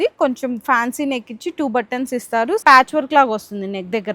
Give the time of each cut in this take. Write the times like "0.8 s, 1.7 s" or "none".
2.6 s